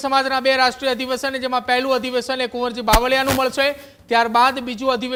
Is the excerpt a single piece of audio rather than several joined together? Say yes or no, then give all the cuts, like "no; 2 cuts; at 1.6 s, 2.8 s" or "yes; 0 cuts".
yes; 0 cuts